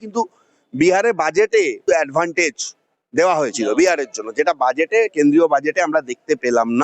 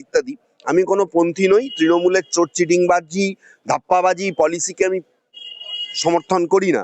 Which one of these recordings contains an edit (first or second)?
first